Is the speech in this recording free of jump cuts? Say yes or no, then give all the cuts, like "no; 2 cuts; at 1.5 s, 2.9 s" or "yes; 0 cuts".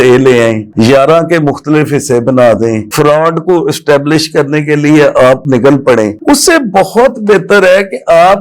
yes; 0 cuts